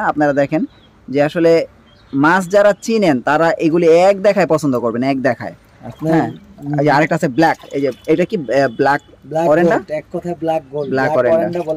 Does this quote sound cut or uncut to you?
uncut